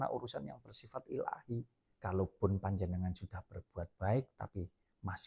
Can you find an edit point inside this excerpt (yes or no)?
yes